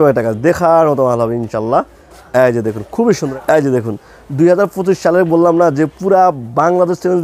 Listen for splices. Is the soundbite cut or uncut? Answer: cut